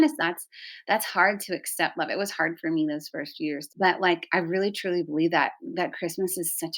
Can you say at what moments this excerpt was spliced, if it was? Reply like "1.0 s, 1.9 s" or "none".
3.6 s